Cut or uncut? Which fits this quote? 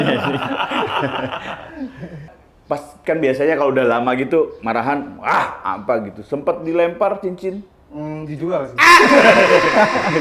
cut